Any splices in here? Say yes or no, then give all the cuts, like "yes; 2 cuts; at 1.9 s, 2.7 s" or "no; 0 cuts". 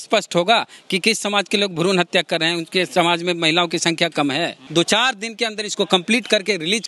yes; 1 cut; at 4.6 s